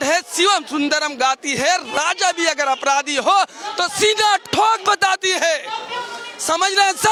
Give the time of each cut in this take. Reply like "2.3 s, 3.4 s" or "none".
none